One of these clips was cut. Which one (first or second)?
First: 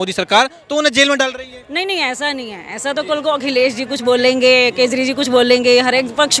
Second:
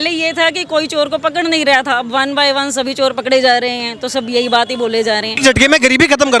second